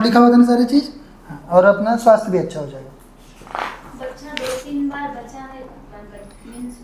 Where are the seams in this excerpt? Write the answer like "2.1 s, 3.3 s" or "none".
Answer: none

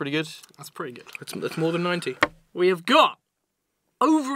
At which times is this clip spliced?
2.1 s

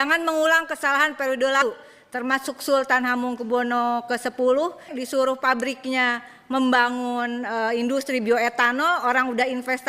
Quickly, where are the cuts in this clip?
4.9 s

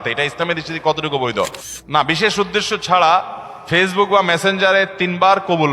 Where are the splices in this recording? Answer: 1.7 s

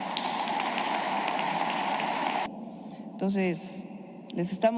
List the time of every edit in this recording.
2.5 s

